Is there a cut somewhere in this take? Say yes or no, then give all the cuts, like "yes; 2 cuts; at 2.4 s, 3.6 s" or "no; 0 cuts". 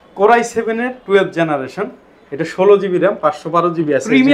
no; 0 cuts